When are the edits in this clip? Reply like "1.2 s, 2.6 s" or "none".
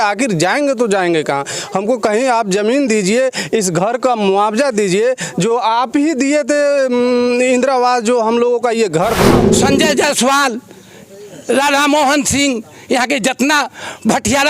9.3 s